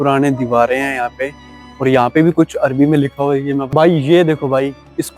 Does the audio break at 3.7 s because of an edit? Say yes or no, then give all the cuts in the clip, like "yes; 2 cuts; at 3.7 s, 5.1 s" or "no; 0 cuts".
yes; 1 cut; at 3.7 s